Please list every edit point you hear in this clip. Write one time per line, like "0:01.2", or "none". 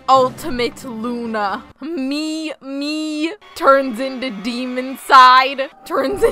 none